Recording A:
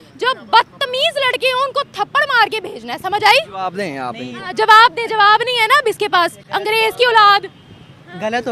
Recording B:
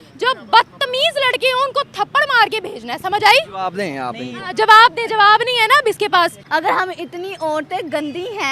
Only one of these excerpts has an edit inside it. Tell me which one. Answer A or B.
B